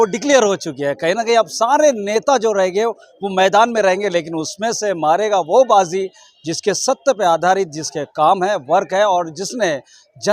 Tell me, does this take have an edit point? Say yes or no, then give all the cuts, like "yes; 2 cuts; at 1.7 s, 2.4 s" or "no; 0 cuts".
no; 0 cuts